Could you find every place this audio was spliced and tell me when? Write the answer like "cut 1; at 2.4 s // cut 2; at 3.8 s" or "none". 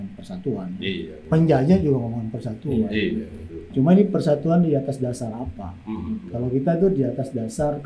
cut 1; at 1.1 s